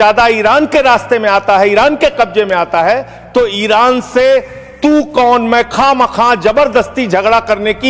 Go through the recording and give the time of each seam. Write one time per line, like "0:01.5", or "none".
none